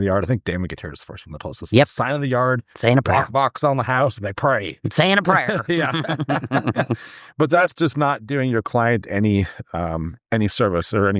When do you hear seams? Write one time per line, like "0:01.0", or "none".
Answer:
0:07.7